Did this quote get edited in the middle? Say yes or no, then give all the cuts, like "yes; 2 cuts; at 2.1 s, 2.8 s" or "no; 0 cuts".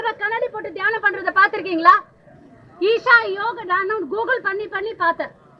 no; 0 cuts